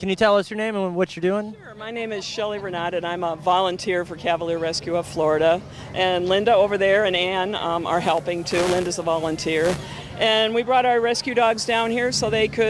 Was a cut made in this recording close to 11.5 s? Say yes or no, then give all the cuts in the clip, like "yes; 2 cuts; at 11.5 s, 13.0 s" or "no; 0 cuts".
no; 1 cut; at 10.2 s